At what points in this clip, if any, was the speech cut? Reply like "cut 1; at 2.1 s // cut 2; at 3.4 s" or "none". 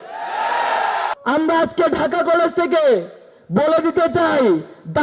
cut 1; at 1.1 s